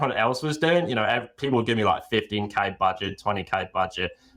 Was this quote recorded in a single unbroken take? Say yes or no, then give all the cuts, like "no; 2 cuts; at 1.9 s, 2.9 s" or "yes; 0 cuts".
yes; 0 cuts